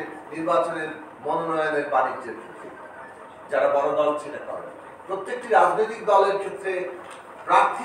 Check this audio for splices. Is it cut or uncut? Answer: uncut